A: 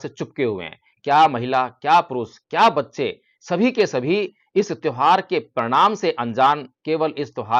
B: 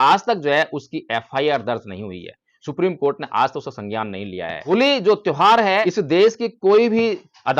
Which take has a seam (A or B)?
B